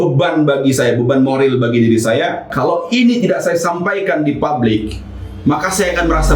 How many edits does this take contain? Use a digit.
1